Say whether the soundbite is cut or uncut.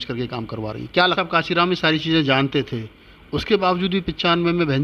cut